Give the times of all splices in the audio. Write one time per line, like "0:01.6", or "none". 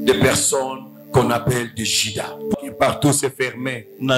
0:02.5